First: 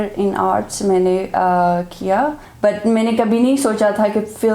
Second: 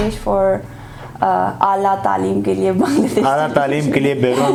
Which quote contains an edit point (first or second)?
first